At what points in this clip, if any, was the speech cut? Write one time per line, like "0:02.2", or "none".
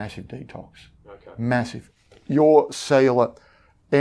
0:01.8